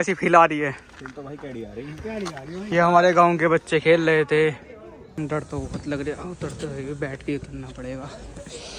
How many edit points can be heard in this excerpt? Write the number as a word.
two